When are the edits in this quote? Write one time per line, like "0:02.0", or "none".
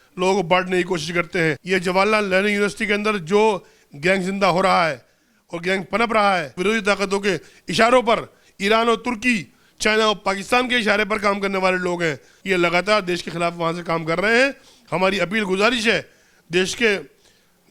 0:01.6
0:06.5
0:12.3